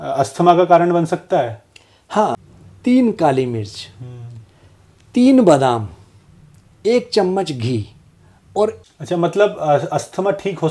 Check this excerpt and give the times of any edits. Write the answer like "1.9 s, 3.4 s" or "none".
2.4 s, 8.8 s